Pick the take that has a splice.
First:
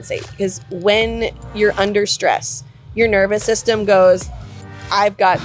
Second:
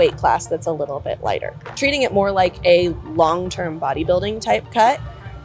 second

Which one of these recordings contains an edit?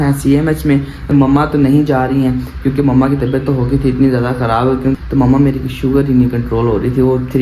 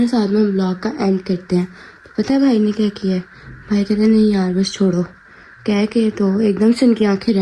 first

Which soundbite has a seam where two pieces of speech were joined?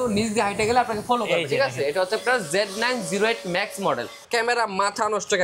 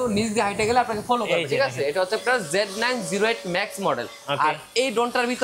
first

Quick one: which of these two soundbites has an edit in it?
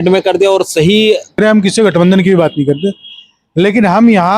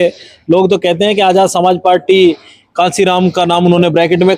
first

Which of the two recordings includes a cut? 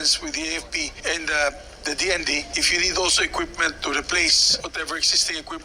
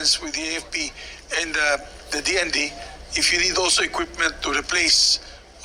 first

